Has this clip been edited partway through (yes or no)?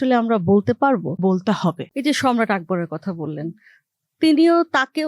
yes